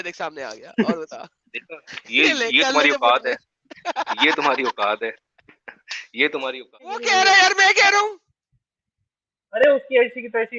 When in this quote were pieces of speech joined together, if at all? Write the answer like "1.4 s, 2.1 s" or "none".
7.0 s